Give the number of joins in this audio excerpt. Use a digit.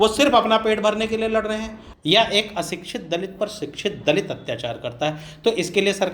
1